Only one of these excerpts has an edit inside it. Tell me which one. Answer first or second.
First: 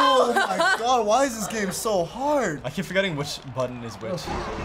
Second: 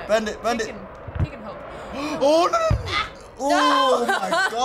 first